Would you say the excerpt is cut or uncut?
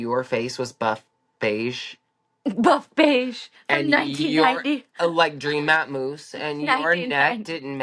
uncut